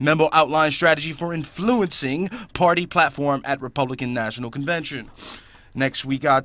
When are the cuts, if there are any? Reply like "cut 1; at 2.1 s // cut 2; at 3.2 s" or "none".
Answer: cut 1; at 3.4 s